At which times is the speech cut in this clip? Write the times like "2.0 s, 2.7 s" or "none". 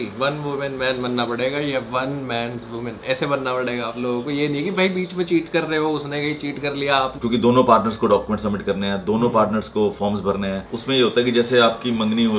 7.2 s, 10.6 s

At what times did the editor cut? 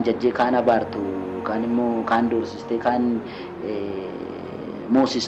none

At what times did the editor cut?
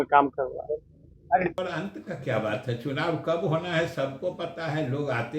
1.5 s

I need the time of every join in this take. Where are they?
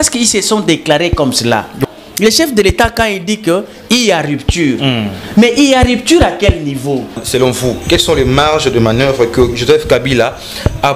1.8 s, 7.2 s

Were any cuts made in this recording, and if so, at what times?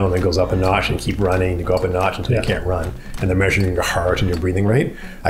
none

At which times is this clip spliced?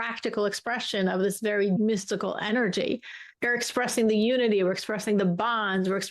1.8 s, 3.3 s

